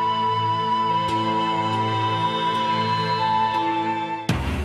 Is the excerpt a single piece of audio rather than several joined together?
yes; 0 cuts

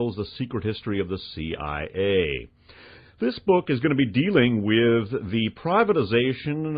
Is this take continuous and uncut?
yes; 0 cuts

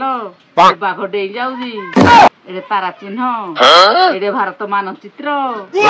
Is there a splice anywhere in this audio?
no; 0 cuts

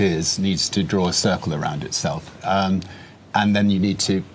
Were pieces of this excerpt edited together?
no; 0 cuts

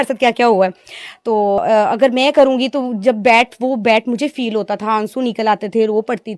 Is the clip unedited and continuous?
no; 1 cut; at 1.6 s

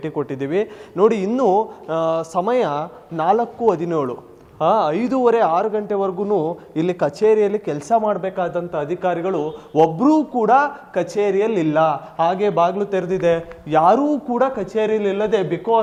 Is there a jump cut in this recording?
no; 0 cuts

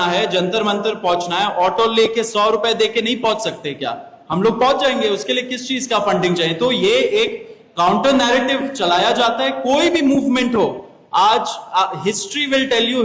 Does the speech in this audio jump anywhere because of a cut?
no; 0 cuts

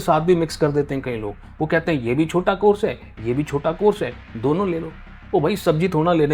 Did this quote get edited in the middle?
no; 0 cuts

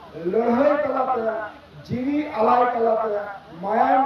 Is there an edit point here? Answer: no; 0 cuts

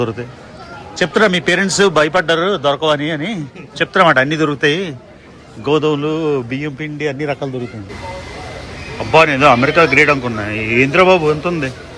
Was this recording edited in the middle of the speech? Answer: yes; 1 cut; at 7.9 s

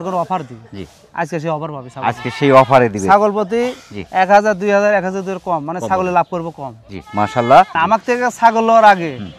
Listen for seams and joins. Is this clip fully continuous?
no; 1 cut; at 7.7 s

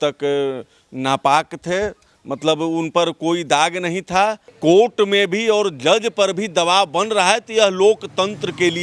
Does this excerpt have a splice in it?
yes; 1 cut; at 4.5 s

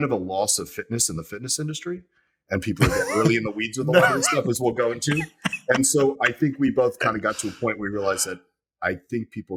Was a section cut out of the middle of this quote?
no; 0 cuts

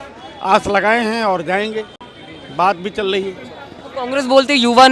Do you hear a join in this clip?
no; 0 cuts

